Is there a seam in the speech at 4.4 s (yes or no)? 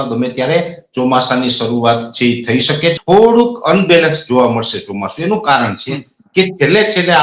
no